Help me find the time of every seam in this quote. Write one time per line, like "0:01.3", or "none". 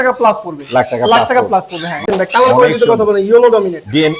0:02.1